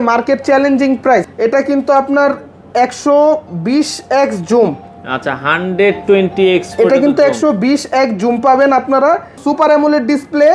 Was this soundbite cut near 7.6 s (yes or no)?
no